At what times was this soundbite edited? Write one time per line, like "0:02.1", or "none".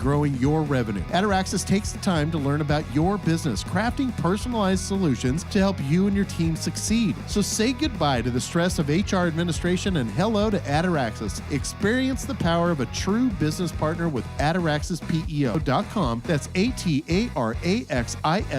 0:15.6

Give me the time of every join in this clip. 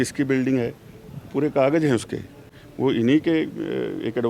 none

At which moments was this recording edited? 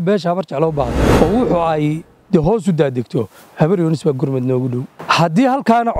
0:01.0
0:04.9

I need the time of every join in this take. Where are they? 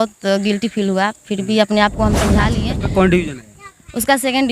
0:02.6

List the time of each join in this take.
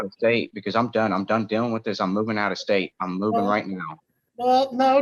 none

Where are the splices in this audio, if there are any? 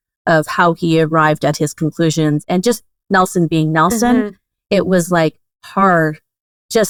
none

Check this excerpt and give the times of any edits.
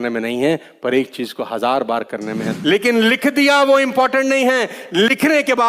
0:02.5

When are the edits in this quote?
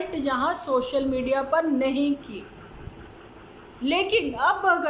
none

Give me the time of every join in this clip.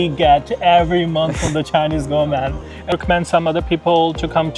0:02.9

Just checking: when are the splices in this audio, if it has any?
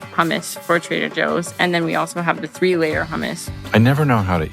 0:03.5

